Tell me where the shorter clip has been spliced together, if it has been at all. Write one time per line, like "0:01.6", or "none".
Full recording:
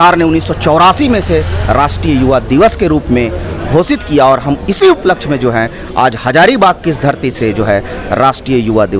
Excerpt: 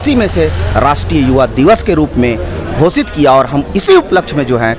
none